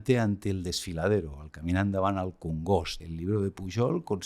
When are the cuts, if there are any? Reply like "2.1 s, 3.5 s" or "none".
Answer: 3.0 s

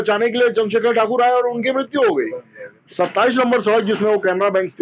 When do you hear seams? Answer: 2.7 s

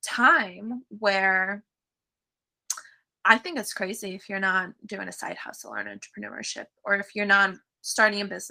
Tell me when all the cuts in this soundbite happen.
none

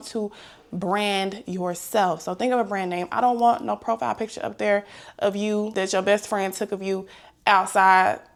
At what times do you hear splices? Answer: none

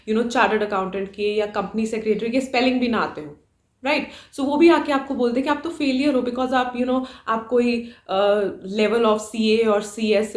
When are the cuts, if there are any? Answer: none

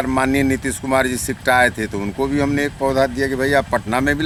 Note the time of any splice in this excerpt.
none

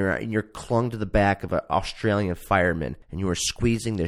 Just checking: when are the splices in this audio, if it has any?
3.0 s

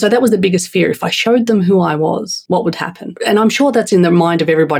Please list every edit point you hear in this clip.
2.4 s, 3.1 s

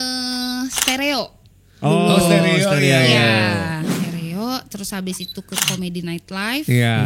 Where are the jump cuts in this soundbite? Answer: 4.0 s

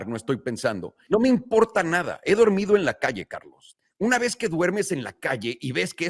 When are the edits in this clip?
1.0 s

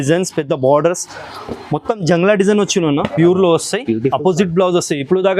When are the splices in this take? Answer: 3.1 s

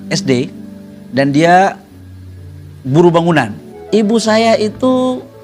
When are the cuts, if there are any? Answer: 3.6 s

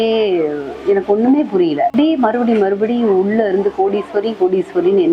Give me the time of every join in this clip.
1.9 s

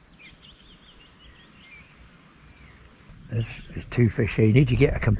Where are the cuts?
3.2 s

